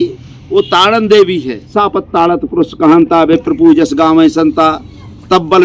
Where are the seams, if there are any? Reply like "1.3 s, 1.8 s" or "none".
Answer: 1.6 s